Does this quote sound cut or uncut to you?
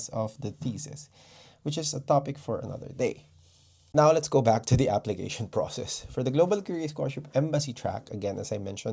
uncut